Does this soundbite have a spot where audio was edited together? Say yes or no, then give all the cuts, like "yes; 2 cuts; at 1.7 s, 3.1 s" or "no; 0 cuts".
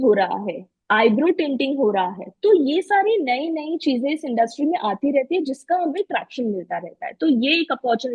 no; 0 cuts